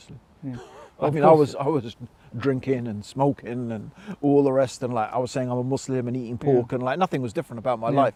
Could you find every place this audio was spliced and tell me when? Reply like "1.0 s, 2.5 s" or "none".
none